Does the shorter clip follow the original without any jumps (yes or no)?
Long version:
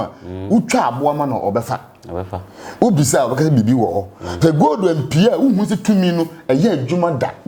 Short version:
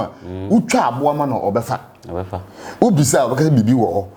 yes